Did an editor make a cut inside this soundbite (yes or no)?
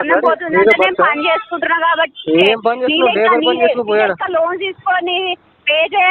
no